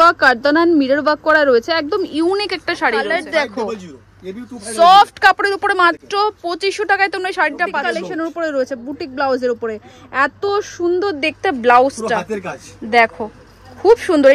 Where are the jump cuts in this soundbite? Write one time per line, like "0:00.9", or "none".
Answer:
0:03.1
0:07.8

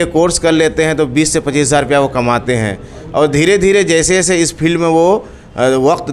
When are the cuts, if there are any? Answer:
none

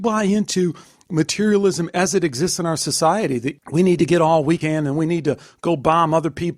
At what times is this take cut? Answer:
0:03.6

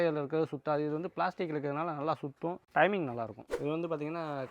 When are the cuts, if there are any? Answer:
0:03.4

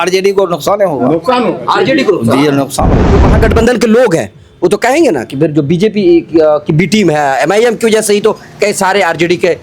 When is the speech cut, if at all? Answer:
0:03.1

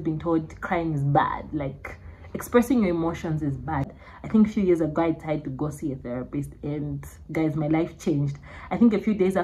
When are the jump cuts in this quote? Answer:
0:03.9

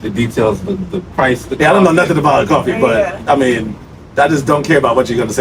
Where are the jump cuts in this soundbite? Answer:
none

